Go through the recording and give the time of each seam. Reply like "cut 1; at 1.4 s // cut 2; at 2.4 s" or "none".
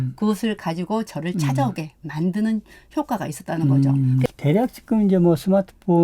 cut 1; at 4.2 s